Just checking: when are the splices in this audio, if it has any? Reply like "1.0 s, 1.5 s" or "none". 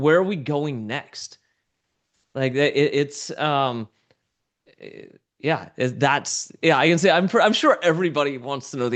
none